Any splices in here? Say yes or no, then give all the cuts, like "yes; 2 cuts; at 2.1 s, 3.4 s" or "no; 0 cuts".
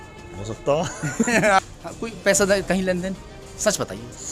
yes; 1 cut; at 1.6 s